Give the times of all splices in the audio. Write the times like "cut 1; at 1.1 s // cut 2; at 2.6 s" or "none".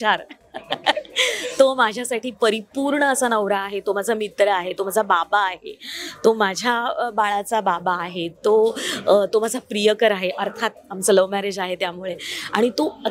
none